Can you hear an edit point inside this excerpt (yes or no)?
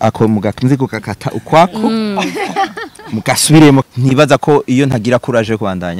yes